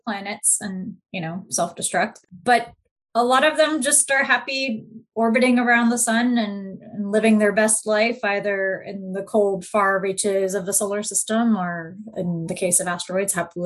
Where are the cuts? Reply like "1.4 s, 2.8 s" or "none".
none